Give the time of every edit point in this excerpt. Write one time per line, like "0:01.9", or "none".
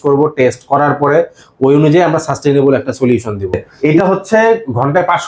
0:03.8